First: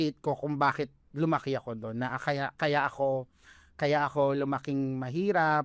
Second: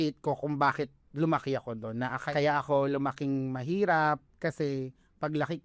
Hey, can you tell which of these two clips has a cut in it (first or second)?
second